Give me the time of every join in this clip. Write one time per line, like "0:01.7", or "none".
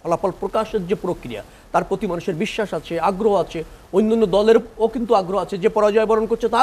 none